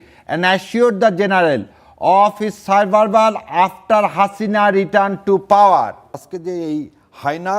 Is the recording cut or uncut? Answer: cut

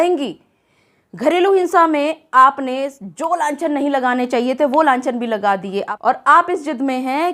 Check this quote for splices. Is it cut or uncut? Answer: cut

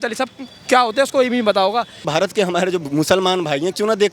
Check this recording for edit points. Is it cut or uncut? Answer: cut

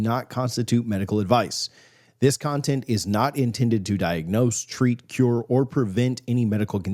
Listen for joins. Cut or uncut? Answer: uncut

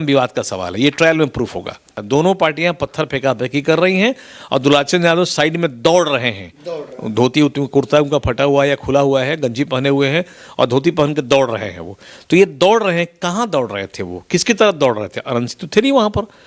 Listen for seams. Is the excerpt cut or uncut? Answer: cut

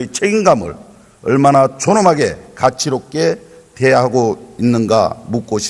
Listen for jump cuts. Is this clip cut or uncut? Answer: uncut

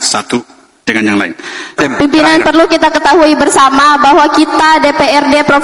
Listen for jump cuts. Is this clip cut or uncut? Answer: cut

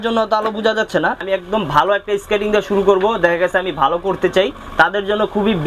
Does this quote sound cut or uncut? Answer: cut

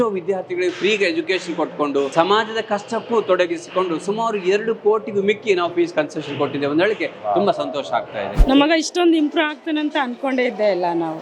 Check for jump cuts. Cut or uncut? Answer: cut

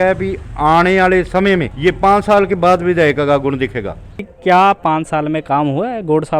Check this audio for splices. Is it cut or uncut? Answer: cut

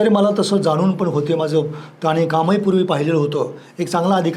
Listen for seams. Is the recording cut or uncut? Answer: uncut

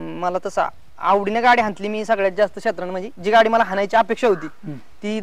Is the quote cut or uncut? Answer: uncut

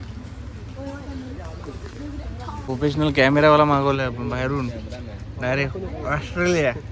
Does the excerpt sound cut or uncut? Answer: cut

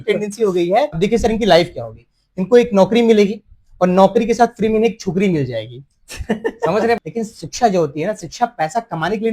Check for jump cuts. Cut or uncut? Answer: cut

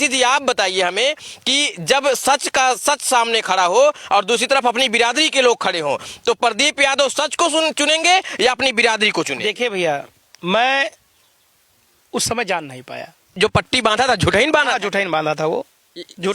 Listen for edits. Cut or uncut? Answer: cut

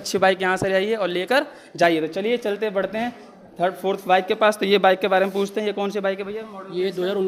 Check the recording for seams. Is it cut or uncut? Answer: uncut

